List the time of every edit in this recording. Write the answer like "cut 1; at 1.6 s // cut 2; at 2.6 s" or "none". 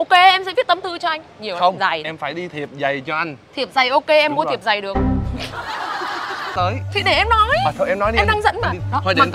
cut 1; at 6.5 s